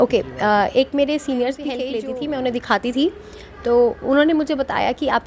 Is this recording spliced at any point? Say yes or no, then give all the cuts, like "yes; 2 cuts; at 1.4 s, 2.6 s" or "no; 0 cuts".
yes; 1 cut; at 1.8 s